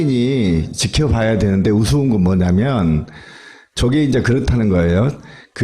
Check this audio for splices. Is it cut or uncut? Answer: uncut